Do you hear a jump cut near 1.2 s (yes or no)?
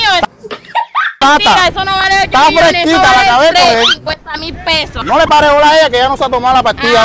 yes